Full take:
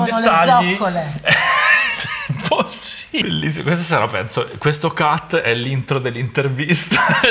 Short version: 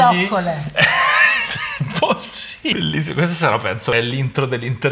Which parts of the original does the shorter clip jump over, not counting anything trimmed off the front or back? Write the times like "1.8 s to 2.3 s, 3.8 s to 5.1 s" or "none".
4.4 s to 5.5 s